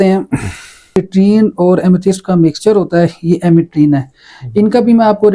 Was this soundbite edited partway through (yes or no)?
yes